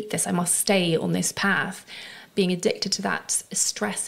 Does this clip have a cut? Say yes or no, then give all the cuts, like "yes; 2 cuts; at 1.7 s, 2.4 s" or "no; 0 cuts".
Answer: yes; 1 cut; at 2.3 s